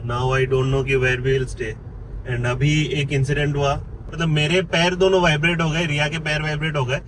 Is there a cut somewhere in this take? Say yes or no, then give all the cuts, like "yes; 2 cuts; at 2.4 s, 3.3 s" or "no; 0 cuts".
yes; 1 cut; at 4.0 s